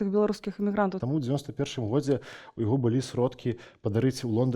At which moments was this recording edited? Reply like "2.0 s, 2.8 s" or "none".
1.0 s